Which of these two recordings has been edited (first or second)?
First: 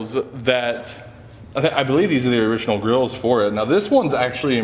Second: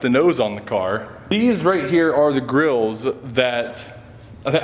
second